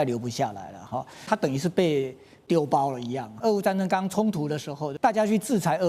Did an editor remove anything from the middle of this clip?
yes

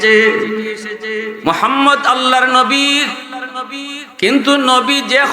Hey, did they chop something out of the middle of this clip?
yes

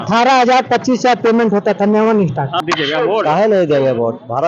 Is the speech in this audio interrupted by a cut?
yes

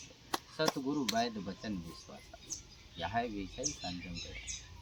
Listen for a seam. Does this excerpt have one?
no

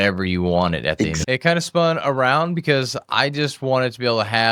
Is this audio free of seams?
no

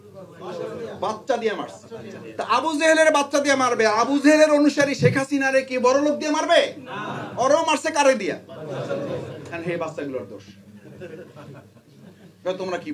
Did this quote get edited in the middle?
no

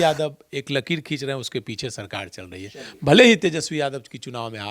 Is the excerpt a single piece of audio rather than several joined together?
yes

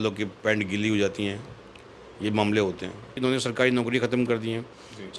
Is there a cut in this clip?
yes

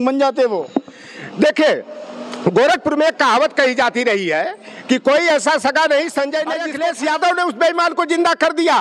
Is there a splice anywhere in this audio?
yes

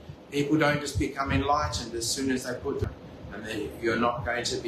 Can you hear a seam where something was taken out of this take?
yes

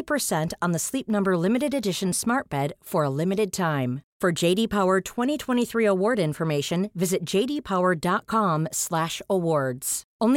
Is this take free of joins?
yes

